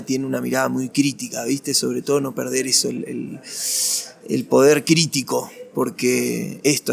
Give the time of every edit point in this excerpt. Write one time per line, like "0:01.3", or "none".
none